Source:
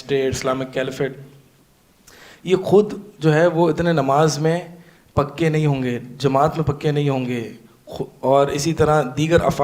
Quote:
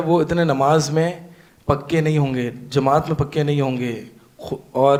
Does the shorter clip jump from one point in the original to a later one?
no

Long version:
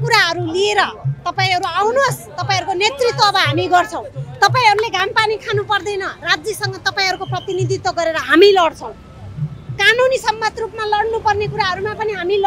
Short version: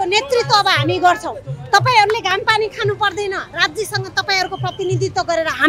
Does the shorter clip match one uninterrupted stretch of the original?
yes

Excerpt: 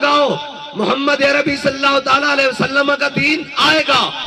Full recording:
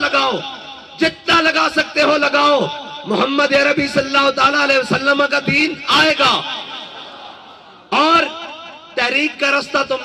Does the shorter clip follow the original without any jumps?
yes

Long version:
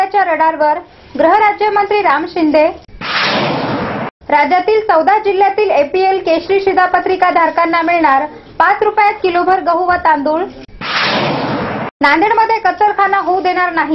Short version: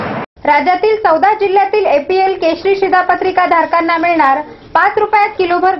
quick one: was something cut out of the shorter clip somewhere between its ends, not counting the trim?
no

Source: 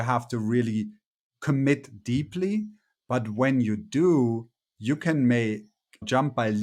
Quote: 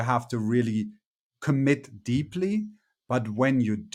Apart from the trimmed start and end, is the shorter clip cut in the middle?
no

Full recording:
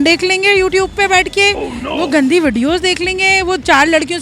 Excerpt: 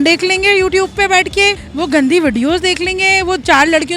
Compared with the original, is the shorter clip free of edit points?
no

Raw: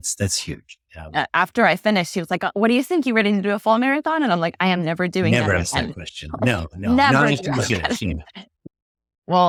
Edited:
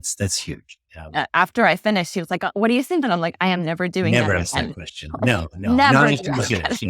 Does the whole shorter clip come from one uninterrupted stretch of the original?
no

